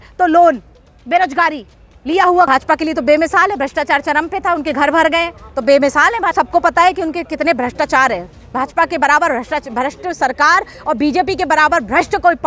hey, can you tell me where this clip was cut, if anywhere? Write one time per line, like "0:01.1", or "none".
0:02.5
0:06.3